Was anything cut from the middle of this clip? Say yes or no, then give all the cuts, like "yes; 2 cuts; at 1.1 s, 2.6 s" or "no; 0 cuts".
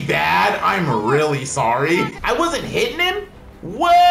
yes; 1 cut; at 2.2 s